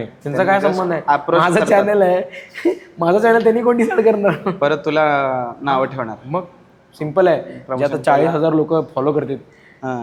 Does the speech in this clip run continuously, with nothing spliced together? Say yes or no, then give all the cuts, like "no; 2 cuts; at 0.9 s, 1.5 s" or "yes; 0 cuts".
yes; 0 cuts